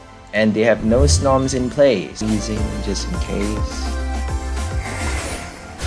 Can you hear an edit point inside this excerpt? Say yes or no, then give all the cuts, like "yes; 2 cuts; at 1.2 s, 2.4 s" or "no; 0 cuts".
yes; 1 cut; at 2.2 s